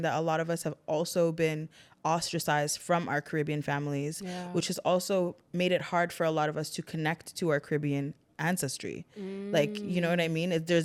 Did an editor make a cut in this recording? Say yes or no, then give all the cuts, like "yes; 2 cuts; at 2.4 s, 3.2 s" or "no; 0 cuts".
no; 0 cuts